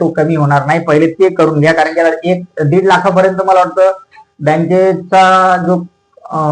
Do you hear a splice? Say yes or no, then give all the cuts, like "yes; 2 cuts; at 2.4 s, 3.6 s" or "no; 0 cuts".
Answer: no; 0 cuts